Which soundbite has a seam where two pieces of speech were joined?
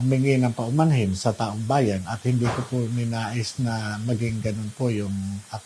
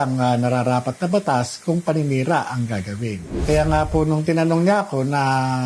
second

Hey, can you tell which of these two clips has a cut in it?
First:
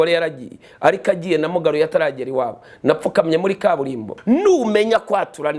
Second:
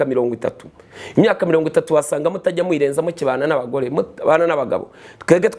first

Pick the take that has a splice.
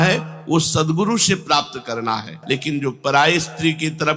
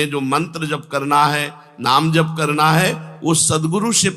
first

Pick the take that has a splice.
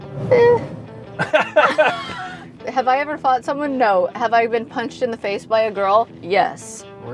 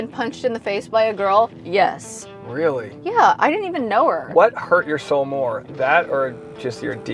first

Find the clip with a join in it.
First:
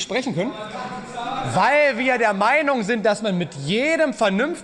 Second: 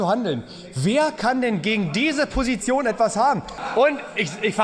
second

